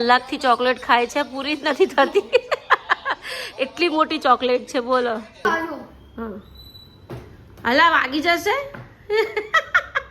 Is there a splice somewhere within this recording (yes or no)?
yes